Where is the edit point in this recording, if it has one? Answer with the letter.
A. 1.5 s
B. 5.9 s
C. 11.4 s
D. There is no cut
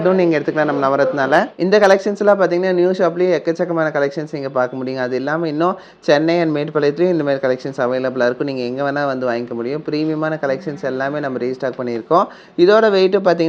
A